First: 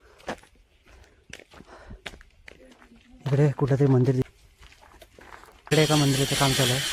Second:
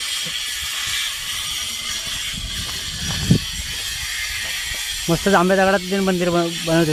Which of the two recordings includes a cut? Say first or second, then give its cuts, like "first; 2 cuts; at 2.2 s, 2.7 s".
first; 1 cut; at 4.2 s